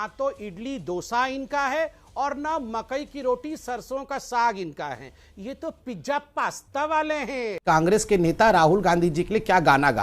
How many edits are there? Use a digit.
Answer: 1